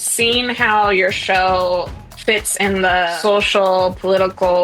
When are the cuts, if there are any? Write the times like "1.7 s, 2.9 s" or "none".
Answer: 3.1 s